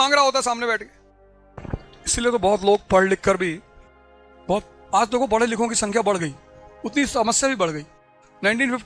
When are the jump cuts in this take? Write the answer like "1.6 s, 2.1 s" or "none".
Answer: 1.5 s